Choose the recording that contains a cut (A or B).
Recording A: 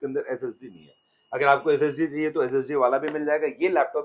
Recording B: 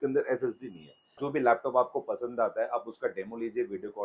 B